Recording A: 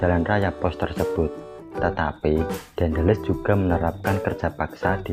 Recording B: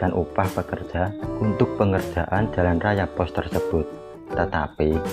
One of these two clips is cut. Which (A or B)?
B